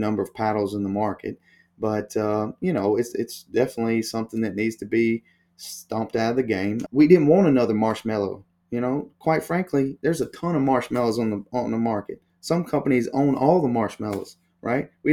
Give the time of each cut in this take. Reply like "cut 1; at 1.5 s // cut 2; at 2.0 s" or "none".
cut 1; at 6.8 s